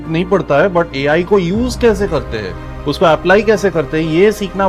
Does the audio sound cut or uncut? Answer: uncut